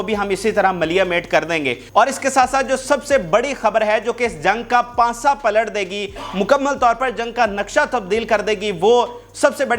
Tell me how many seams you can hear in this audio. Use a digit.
0